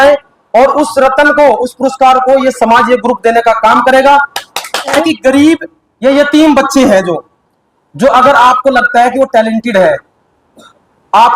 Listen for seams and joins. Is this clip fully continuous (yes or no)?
no